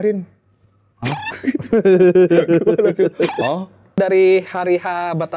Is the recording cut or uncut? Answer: cut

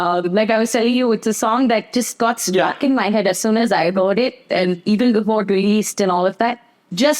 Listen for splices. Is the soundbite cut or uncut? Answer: uncut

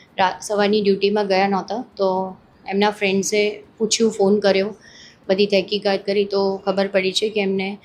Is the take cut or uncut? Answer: uncut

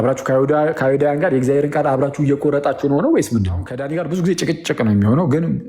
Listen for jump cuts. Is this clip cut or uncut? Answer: cut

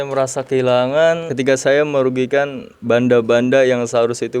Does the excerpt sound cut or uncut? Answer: cut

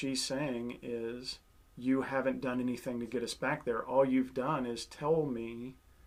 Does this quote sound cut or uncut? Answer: uncut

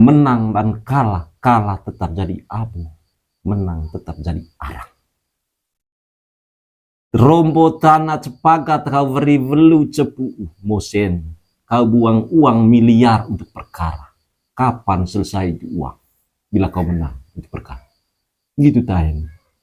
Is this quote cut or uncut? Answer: uncut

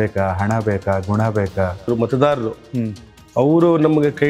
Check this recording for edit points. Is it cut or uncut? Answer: cut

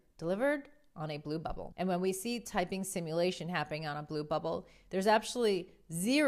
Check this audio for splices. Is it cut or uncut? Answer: cut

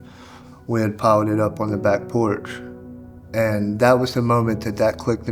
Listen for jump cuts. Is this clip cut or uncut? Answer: uncut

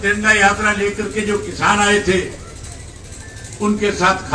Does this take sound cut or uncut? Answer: uncut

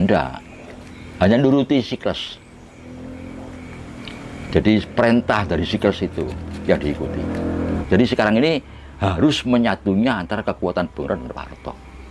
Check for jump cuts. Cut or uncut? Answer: cut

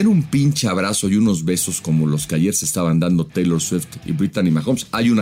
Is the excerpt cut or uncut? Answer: uncut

